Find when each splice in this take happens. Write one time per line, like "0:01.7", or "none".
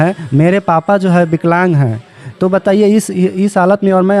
none